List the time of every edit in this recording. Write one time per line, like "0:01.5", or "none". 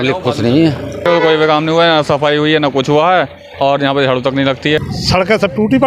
0:01.0
0:04.9